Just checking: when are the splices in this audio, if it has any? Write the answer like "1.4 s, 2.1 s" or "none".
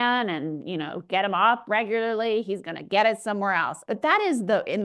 3.7 s